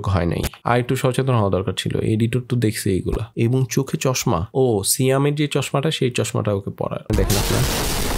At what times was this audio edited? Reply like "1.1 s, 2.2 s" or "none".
3.3 s, 7.1 s